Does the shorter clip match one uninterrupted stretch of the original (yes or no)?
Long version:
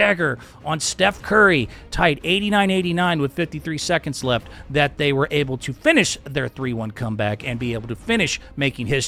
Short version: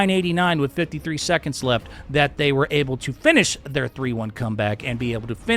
yes